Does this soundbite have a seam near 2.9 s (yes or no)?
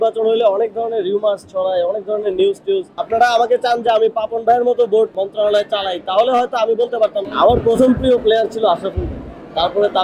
yes